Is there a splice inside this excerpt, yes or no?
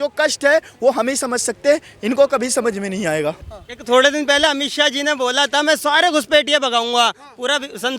yes